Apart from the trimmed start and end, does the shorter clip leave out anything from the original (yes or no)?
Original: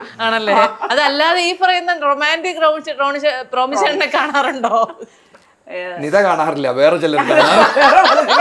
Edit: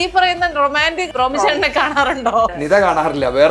yes